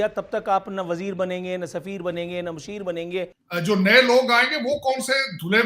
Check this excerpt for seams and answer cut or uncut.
cut